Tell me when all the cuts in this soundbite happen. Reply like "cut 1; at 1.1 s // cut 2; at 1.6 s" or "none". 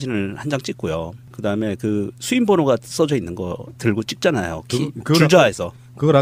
cut 1; at 4.1 s